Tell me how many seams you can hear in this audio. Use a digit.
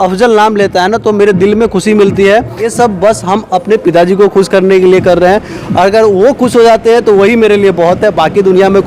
1